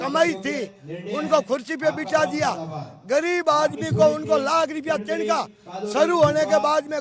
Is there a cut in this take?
no; 0 cuts

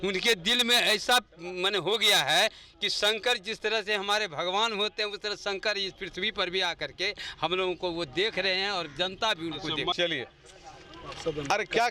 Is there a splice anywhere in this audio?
no; 0 cuts

